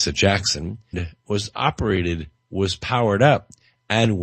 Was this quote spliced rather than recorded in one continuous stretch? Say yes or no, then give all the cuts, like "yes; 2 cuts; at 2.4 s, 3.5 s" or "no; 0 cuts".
no; 0 cuts